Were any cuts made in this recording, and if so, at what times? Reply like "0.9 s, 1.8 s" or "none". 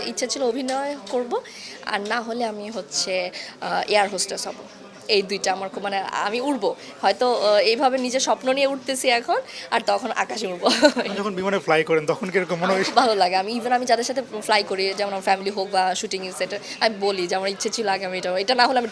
none